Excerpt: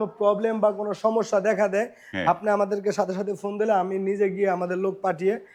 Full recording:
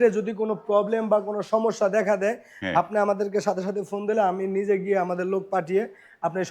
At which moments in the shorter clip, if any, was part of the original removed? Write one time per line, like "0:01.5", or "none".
none